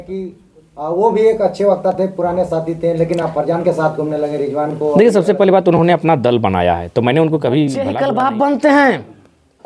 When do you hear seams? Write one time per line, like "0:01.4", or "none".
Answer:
0:08.0